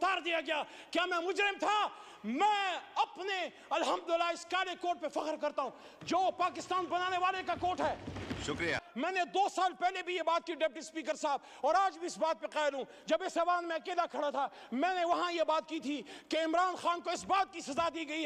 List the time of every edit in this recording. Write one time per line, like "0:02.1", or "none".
0:08.8